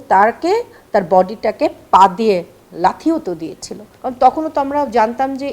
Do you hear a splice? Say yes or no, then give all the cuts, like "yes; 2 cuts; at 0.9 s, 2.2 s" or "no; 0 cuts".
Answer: yes; 1 cut; at 3.9 s